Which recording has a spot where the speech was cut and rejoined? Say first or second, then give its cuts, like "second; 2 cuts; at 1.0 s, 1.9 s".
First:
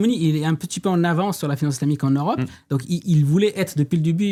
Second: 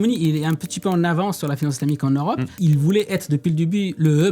second; 1 cut; at 2.5 s